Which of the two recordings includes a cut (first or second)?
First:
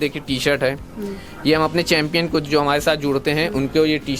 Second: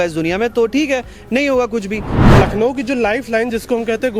second